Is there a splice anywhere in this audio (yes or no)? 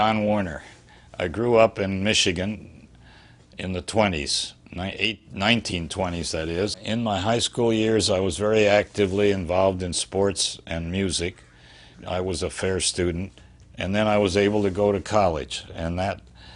yes